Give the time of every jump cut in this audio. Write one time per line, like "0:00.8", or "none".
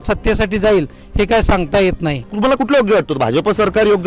0:02.3